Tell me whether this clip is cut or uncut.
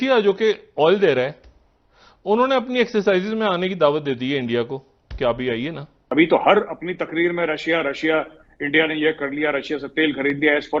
cut